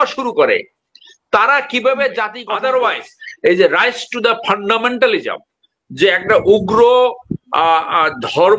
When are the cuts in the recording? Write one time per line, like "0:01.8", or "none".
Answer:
0:02.4